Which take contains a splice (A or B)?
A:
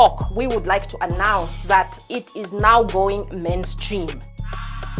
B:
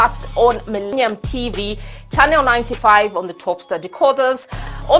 B